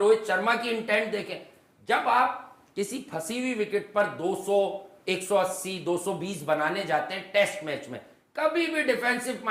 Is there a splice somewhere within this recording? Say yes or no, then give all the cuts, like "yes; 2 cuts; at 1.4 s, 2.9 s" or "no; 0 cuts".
no; 0 cuts